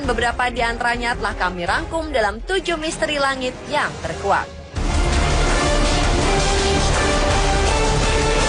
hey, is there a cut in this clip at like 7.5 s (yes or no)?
no